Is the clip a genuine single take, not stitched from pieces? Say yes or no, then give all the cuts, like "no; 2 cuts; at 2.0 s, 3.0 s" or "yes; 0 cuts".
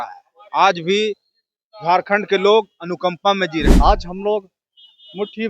no; 1 cut; at 3.8 s